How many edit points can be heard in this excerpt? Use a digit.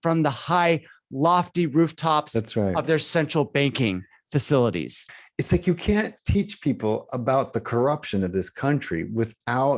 1